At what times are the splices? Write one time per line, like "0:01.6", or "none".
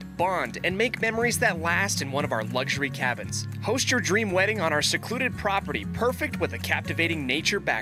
none